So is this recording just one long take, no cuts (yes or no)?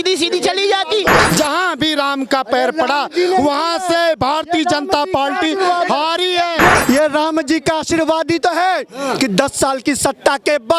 no